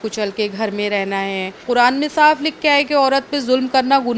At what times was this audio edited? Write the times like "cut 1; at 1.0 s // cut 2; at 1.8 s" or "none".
cut 1; at 1.6 s